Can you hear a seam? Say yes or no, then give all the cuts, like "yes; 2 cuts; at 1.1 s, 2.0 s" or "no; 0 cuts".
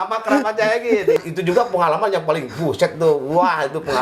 yes; 1 cut; at 1.2 s